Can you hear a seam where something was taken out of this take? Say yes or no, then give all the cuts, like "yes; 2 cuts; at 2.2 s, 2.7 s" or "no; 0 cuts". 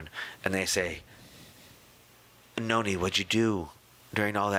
no; 0 cuts